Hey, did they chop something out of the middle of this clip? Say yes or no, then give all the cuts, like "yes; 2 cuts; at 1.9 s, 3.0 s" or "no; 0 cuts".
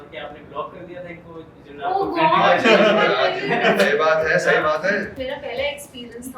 yes; 1 cut; at 5.2 s